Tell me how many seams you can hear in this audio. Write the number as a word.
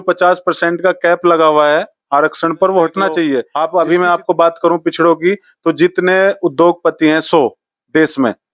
one